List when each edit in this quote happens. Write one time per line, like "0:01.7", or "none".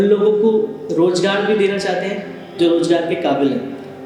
none